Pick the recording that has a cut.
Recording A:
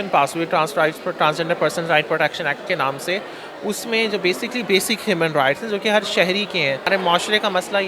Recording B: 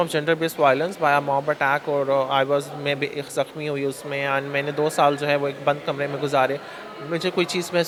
A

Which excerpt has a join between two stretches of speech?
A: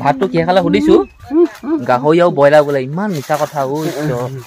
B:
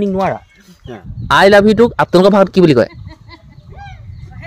B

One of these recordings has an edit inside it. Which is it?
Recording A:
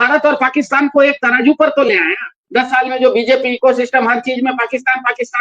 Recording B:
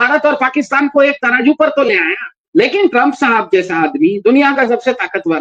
A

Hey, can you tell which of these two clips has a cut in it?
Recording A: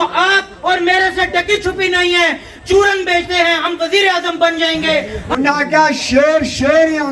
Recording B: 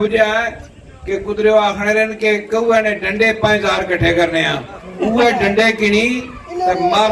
A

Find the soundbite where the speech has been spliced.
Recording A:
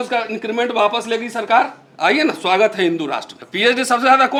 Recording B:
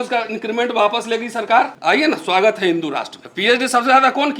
B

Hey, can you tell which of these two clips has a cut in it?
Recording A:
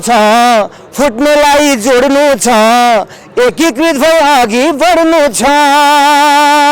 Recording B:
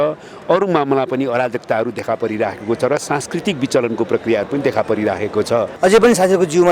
B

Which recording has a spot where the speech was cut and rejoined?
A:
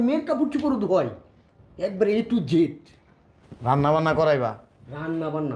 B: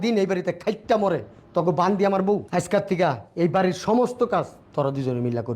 B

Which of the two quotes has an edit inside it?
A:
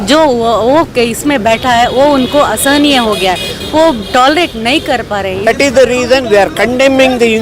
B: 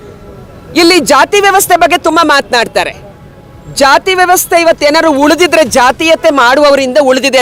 A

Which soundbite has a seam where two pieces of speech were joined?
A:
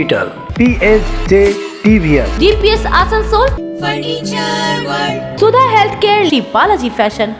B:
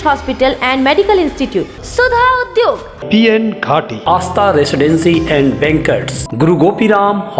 A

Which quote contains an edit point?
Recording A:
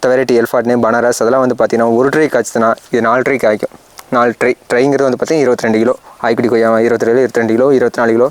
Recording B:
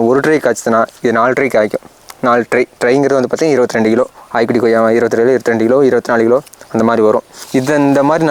B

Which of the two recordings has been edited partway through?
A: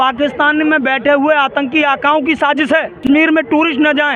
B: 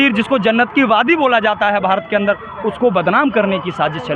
A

